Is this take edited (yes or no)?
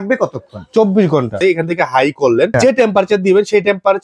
yes